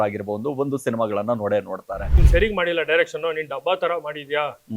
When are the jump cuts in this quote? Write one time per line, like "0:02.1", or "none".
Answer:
0:02.1